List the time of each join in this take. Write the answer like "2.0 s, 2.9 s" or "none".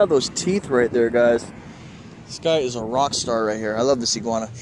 none